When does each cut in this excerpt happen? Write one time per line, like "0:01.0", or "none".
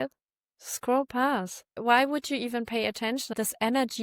0:01.8
0:03.3